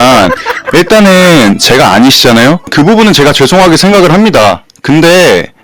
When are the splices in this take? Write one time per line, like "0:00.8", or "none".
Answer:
0:02.7